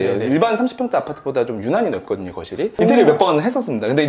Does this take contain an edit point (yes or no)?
yes